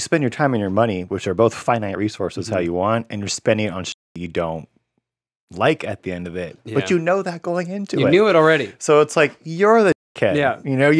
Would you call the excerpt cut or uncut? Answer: uncut